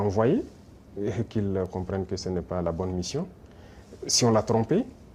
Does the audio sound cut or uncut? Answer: uncut